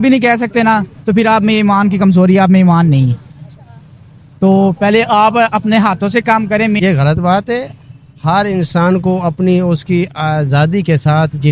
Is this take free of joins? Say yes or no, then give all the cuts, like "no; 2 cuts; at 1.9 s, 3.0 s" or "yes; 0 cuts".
no; 1 cut; at 6.8 s